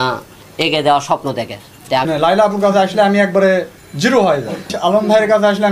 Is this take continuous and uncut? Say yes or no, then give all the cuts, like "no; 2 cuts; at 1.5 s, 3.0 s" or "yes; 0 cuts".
no; 2 cuts; at 2.0 s, 4.7 s